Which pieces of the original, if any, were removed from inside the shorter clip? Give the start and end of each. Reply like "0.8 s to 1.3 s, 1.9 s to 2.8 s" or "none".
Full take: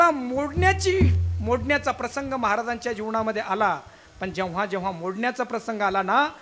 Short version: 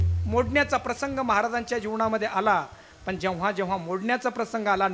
none